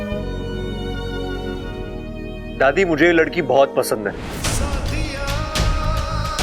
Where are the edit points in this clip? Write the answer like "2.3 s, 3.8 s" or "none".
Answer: 1.7 s